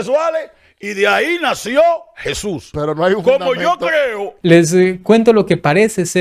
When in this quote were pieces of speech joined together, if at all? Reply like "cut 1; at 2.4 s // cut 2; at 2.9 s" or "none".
cut 1; at 4.3 s